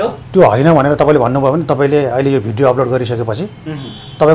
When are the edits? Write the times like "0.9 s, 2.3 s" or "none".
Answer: none